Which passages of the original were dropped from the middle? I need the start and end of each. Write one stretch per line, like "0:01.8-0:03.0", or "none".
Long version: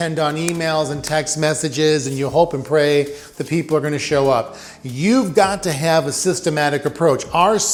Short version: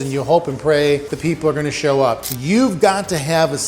0:03.2-0:03.4
0:04.6-0:04.8